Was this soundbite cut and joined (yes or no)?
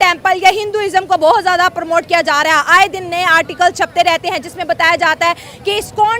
no